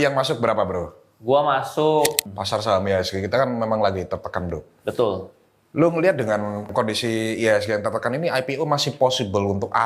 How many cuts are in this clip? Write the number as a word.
two